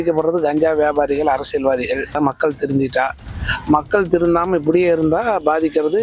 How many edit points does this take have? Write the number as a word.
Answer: one